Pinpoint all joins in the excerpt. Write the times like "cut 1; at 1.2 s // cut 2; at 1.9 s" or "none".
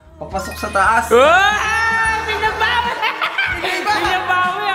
none

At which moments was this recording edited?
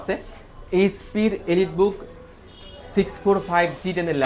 none

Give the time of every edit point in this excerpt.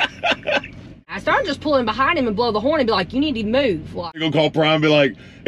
cut 1; at 1.2 s // cut 2; at 4.2 s

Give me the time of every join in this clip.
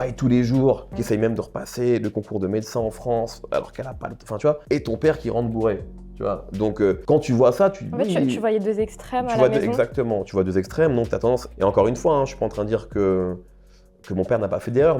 none

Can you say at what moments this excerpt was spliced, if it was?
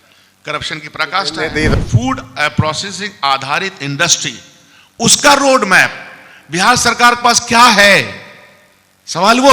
cut 1; at 1.7 s

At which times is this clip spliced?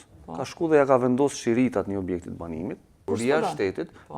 cut 1; at 2.9 s

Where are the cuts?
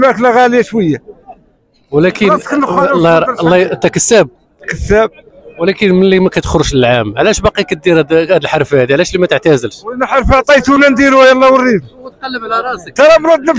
none

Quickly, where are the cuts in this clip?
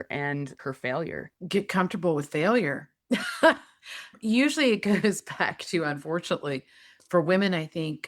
cut 1; at 1.4 s

